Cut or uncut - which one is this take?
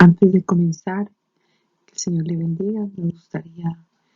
cut